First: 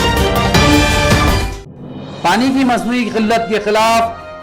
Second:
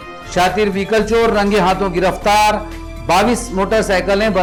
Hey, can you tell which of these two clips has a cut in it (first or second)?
first